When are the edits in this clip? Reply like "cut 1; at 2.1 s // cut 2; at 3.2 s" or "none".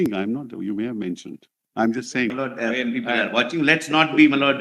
cut 1; at 2.3 s